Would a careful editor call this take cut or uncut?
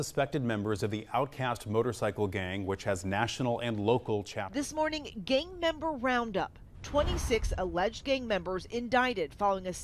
cut